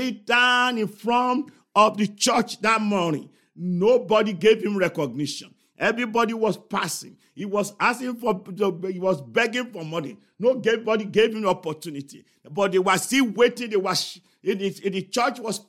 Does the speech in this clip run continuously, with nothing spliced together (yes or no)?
yes